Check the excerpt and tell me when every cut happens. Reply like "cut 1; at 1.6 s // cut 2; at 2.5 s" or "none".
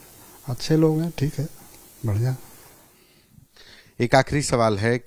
none